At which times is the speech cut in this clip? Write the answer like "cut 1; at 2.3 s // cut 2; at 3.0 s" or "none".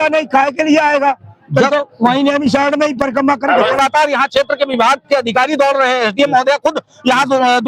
cut 1; at 3.8 s